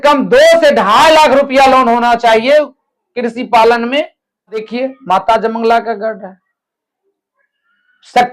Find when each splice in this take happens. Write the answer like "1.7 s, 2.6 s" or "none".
4.7 s